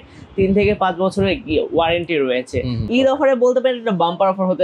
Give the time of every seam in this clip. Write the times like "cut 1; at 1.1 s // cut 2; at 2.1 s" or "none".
cut 1; at 3.0 s